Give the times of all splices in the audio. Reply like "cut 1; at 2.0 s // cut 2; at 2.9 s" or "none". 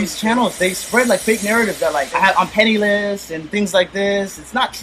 cut 1; at 2.1 s